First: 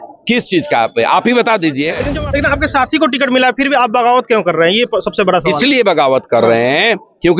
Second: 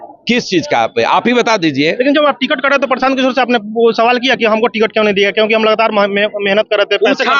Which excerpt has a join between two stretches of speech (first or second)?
first